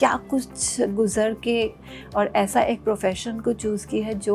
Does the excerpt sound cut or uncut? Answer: cut